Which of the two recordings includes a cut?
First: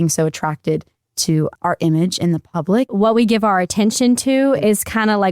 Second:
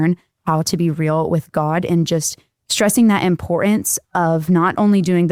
first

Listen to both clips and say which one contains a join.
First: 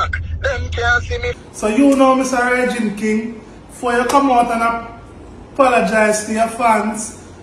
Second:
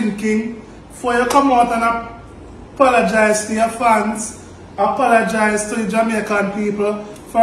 first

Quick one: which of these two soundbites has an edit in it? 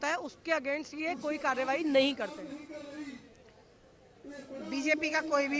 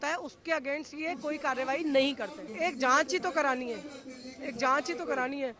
second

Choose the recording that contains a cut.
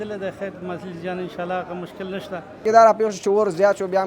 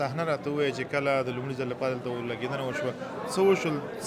first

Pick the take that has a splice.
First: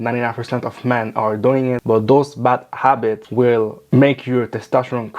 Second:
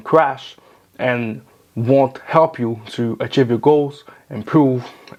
first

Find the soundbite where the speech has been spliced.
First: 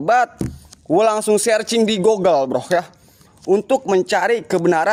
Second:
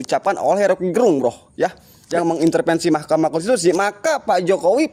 second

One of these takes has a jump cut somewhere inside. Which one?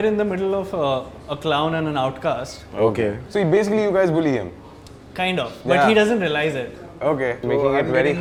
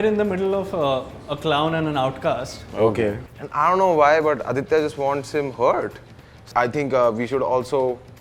second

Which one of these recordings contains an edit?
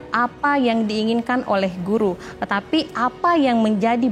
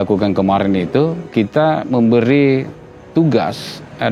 second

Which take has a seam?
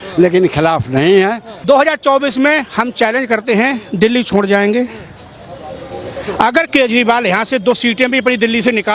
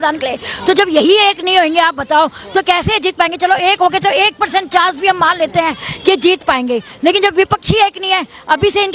first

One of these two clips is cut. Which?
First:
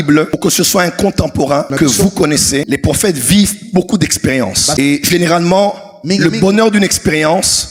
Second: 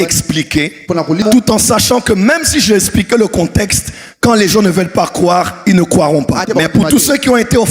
second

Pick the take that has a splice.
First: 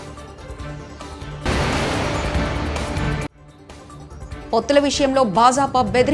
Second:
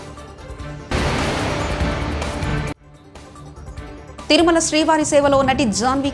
second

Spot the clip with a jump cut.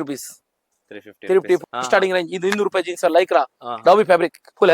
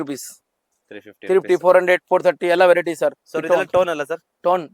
first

